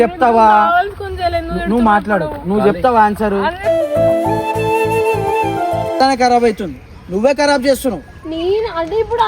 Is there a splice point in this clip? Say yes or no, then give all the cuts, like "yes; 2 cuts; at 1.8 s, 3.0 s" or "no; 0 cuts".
yes; 1 cut; at 6.0 s